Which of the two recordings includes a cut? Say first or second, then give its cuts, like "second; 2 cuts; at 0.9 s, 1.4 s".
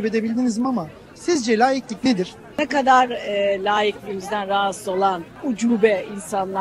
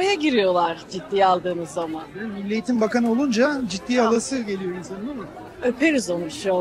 first; 2 cuts; at 2.5 s, 5.3 s